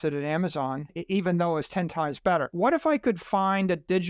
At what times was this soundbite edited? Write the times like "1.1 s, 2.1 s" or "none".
1.0 s, 2.5 s